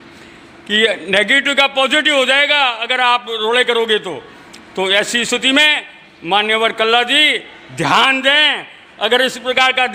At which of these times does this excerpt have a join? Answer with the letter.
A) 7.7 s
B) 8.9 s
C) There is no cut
C